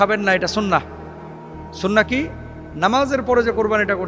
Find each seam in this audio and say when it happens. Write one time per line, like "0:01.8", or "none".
none